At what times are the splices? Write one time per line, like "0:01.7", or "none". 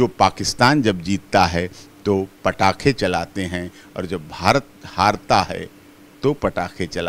none